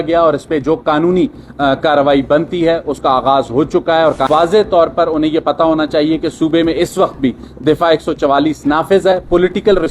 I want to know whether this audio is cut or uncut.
cut